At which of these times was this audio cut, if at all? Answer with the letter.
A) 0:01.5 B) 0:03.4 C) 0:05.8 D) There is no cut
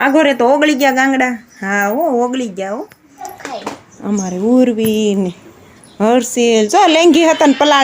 B